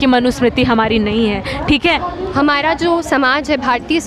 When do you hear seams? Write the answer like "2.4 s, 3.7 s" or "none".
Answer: 2.1 s

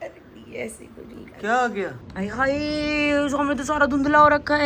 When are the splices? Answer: 2.0 s

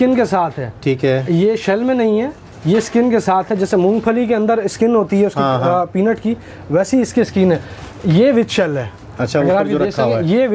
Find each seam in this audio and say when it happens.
none

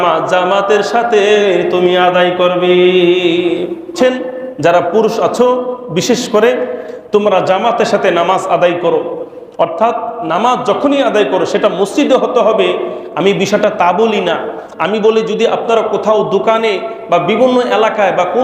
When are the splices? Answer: 3.9 s

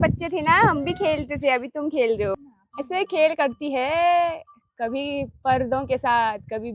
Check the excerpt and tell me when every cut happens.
2.4 s

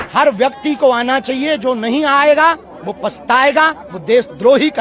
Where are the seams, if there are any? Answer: none

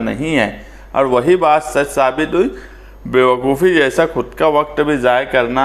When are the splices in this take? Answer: none

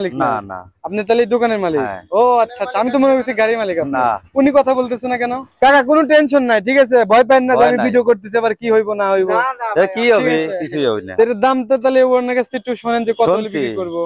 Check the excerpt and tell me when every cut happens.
5.4 s, 11.0 s

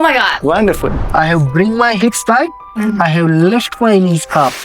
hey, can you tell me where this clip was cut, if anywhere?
1.0 s

